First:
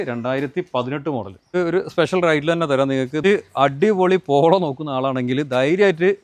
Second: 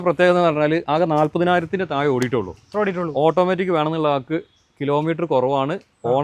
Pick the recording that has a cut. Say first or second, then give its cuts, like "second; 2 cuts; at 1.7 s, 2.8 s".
first; 2 cuts; at 1.5 s, 3.2 s